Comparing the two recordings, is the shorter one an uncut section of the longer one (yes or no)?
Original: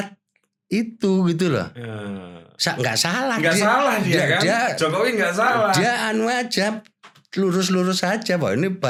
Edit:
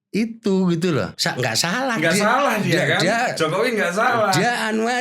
no